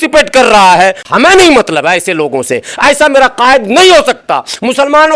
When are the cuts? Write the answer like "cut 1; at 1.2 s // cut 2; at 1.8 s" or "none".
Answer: none

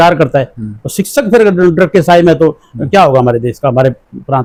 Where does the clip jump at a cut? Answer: none

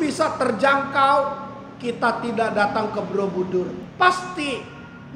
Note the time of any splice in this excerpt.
cut 1; at 3.8 s

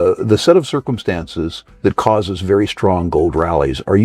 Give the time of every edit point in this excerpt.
cut 1; at 1.6 s

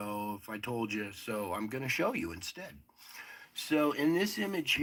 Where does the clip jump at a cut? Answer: none

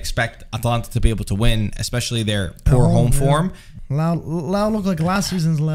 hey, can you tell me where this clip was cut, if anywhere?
cut 1; at 3.7 s

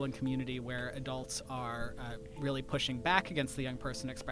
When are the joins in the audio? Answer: none

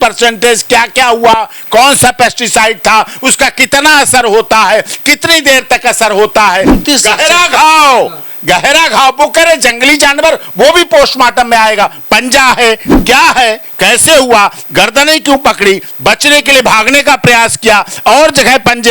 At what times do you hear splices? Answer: cut 1; at 6.8 s // cut 2; at 12.9 s

